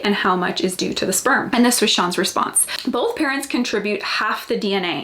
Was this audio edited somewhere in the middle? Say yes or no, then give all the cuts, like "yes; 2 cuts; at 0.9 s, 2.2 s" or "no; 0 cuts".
yes; 2 cuts; at 1.5 s, 2.6 s